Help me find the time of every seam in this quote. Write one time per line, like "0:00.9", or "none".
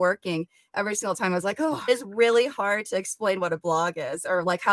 0:01.9